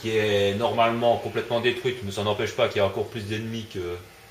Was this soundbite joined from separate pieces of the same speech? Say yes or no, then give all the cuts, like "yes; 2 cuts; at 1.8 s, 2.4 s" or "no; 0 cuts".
yes; 1 cut; at 1.3 s